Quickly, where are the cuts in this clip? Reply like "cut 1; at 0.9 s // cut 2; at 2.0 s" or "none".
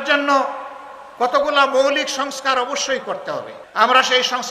cut 1; at 3.6 s